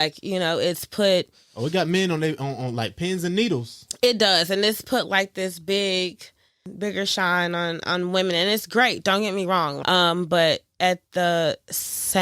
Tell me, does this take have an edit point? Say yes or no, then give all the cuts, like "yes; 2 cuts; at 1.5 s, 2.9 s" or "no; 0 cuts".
yes; 2 cuts; at 6.7 s, 9.8 s